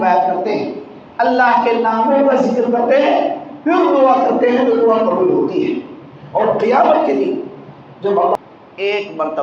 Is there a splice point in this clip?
yes; 1 cut; at 8.4 s

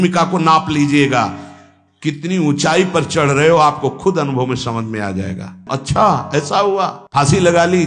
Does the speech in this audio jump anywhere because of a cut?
yes; 1 cut; at 5.7 s

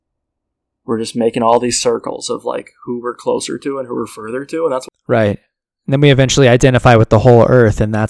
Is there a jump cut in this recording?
no; 0 cuts

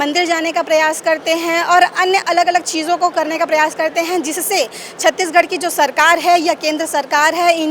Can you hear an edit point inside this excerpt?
no; 0 cuts

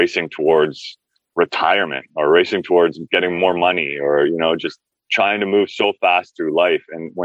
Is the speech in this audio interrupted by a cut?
no; 0 cuts

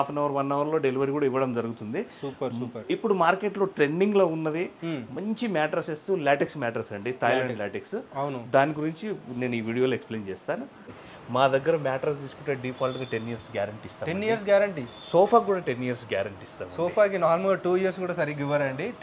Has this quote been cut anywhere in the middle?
yes; 1 cut; at 10.8 s

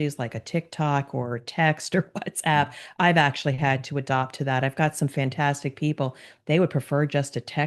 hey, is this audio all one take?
yes; 0 cuts

